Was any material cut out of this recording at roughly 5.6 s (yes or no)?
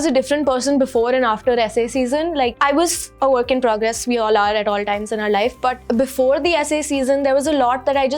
no